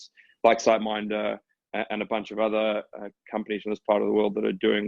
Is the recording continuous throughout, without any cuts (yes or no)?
yes